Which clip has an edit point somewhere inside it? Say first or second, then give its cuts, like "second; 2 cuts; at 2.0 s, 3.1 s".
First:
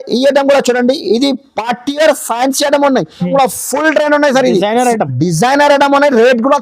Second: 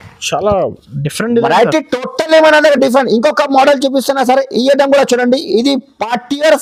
first; 1 cut; at 3.3 s